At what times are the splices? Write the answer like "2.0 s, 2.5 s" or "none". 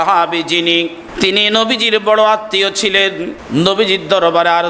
1.0 s, 3.4 s